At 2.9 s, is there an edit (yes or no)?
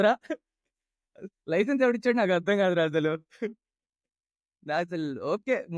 no